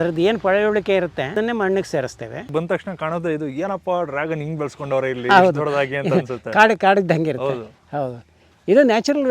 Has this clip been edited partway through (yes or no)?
yes